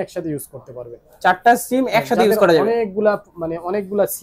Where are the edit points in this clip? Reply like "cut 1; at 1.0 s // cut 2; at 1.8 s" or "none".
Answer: none